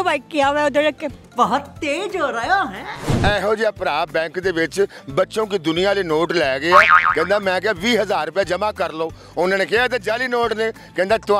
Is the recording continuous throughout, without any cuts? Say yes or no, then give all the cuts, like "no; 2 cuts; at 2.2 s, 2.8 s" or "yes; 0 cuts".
no; 1 cut; at 3.2 s